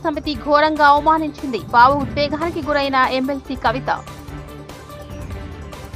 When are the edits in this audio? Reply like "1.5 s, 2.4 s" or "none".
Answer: none